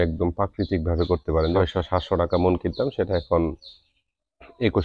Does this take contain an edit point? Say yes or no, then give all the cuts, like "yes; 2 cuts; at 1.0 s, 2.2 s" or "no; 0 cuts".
yes; 1 cut; at 1.6 s